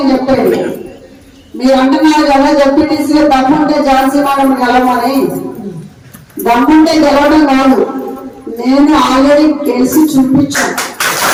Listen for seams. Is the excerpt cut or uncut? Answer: uncut